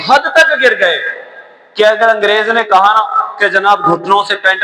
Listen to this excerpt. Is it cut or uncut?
uncut